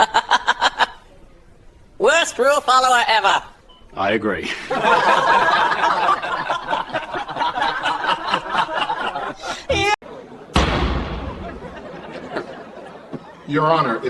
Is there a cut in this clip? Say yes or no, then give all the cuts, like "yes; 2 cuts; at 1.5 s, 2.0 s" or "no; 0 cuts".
no; 0 cuts